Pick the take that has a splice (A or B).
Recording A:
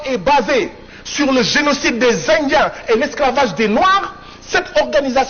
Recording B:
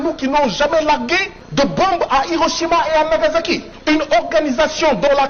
B